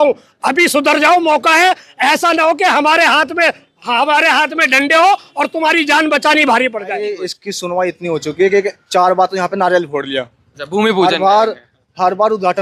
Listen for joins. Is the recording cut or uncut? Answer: cut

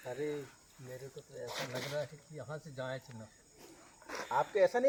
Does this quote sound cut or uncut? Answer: uncut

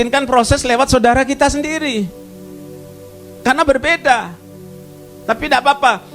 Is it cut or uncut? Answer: uncut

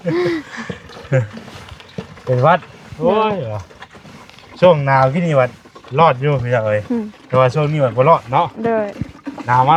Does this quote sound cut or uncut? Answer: uncut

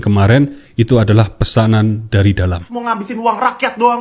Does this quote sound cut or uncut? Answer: cut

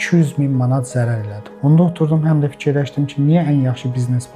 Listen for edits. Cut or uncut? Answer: cut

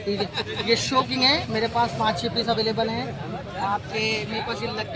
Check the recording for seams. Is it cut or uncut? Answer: uncut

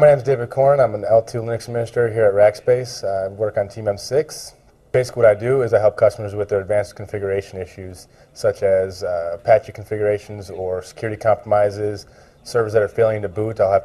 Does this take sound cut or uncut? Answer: uncut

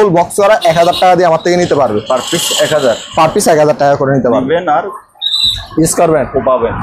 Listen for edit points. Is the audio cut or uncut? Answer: uncut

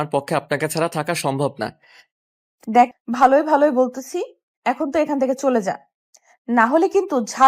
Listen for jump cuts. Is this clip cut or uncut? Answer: cut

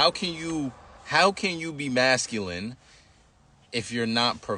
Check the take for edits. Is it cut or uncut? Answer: uncut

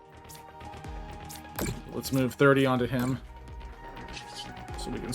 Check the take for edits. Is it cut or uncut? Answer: uncut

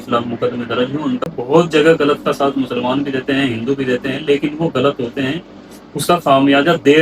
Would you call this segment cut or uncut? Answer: cut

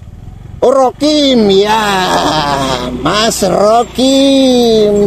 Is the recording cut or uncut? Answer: uncut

